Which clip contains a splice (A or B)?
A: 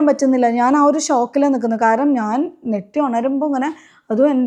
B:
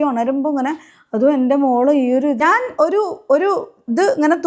B